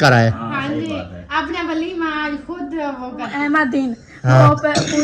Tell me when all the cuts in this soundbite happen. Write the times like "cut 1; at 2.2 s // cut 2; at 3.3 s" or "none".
cut 1; at 3.3 s

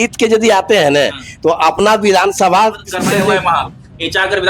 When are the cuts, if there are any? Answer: cut 1; at 3.3 s

